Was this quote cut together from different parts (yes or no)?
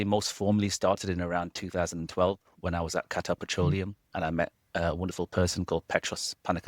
yes